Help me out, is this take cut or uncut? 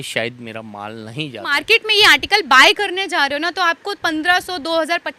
cut